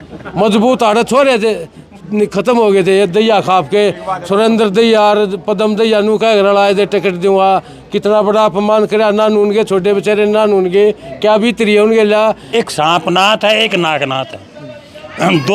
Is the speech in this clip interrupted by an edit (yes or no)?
yes